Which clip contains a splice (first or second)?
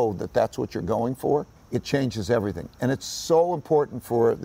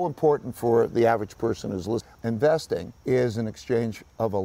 second